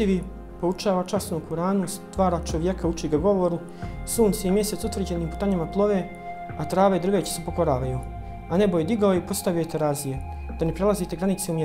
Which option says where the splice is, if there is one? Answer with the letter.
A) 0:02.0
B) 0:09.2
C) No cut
C